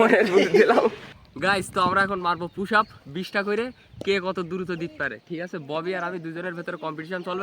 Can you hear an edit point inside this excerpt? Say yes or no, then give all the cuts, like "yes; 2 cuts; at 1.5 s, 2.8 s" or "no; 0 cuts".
yes; 1 cut; at 1.2 s